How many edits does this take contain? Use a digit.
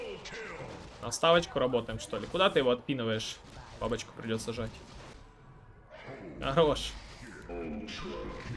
1